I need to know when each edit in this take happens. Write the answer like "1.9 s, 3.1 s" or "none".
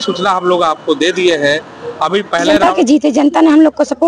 2.6 s